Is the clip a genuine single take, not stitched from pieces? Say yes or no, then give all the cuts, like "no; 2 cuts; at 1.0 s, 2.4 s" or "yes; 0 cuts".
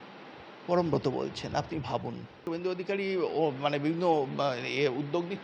no; 1 cut; at 2.4 s